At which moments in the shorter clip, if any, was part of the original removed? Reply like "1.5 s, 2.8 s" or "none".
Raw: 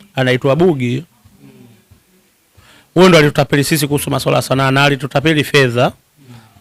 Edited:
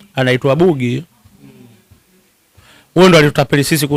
none